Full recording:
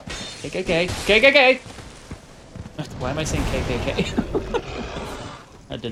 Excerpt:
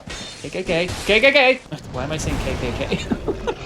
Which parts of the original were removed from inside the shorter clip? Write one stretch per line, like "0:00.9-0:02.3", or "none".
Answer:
0:01.8-0:02.8